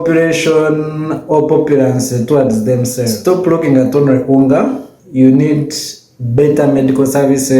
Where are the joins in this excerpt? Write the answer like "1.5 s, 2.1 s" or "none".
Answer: 3.2 s